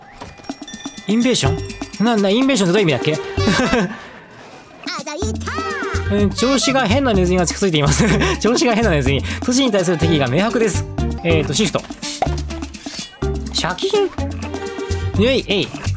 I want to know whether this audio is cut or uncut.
cut